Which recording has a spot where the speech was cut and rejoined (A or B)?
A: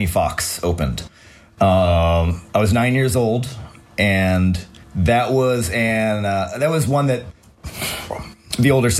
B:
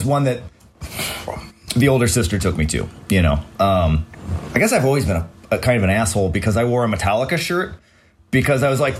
B